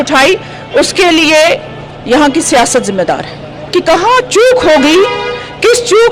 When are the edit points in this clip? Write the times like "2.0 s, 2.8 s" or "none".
3.7 s